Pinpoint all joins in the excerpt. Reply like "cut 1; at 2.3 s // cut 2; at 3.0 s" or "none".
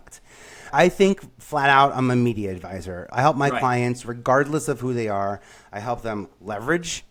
none